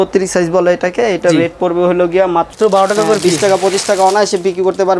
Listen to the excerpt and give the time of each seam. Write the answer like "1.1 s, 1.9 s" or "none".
2.5 s